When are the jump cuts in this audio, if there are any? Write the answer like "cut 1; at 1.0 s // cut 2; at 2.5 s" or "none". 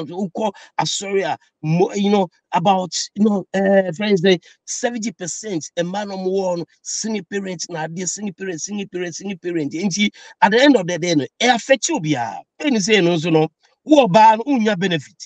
cut 1; at 12.5 s